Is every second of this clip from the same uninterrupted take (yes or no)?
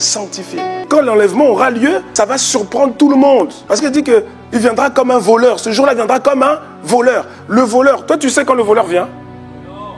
no